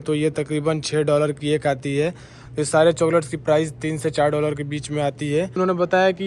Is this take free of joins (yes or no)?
no